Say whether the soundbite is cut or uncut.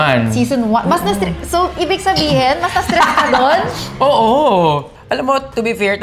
uncut